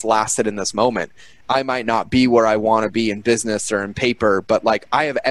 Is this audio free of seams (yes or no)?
no